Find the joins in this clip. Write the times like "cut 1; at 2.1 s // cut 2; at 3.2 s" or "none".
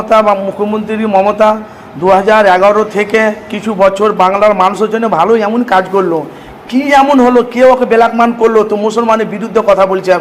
none